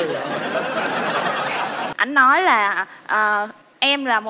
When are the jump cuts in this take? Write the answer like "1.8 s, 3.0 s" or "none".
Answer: 1.9 s